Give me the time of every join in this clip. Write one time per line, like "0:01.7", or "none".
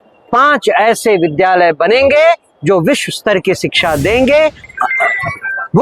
0:04.7